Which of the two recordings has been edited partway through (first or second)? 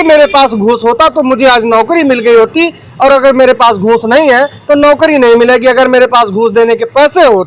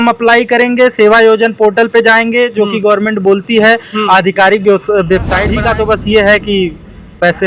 second